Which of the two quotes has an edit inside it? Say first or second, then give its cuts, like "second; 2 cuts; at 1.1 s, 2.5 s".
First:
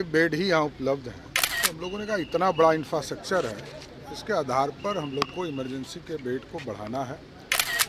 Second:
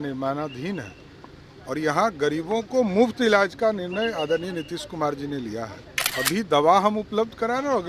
second; 1 cut; at 6.0 s